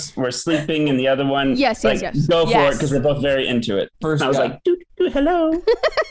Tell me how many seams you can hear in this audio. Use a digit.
1